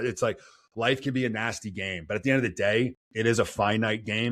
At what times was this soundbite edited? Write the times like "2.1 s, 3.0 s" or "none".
3.0 s

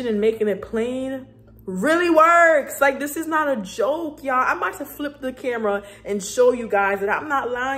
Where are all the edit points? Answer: none

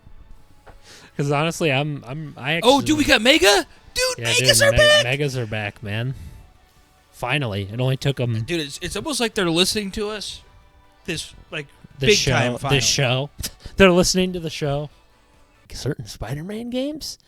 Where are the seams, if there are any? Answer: 15.7 s

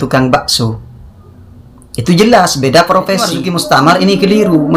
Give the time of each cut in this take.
3.5 s

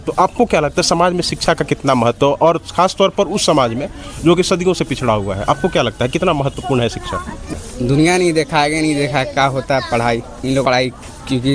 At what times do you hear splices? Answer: 7.4 s, 10.6 s

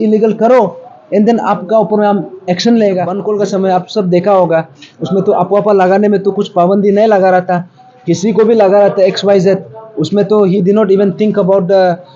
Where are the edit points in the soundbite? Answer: 3.2 s

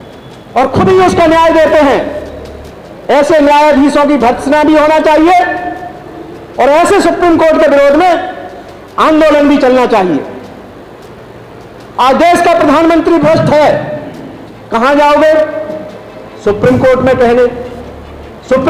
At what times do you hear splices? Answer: none

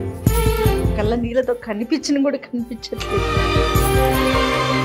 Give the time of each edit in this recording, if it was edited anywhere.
none

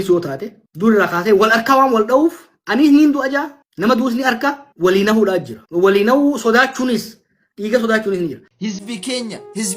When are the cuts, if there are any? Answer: 8.5 s

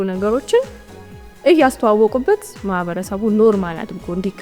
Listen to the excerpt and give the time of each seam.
none

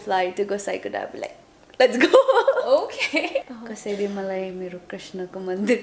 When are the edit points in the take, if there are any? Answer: 3.6 s

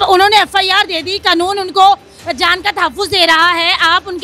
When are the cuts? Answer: none

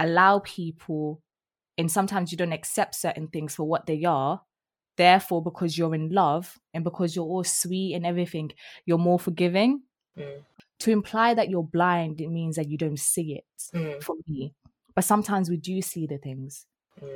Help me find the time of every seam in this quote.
10.4 s

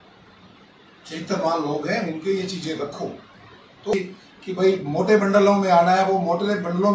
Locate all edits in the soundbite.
3.9 s

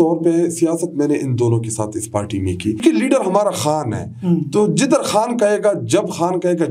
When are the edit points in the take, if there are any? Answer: 2.8 s

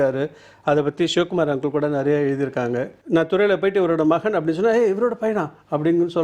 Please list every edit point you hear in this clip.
3.0 s

